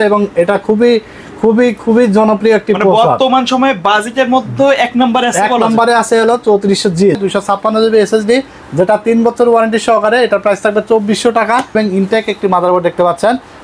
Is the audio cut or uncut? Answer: cut